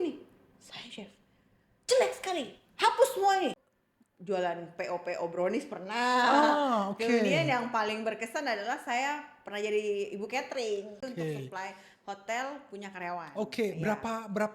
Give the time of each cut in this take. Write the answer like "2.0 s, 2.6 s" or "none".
3.6 s, 11.0 s